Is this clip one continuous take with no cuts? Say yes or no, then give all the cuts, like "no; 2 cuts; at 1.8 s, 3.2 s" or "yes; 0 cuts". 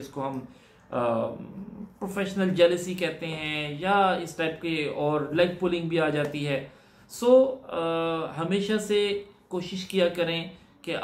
yes; 0 cuts